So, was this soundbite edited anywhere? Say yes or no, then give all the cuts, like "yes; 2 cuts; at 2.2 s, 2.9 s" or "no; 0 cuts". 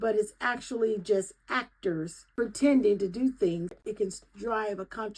yes; 2 cuts; at 2.2 s, 3.8 s